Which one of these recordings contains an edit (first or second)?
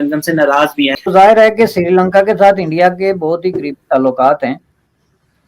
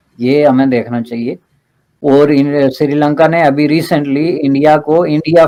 first